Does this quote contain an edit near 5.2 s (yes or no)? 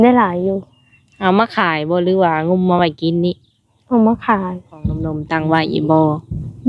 yes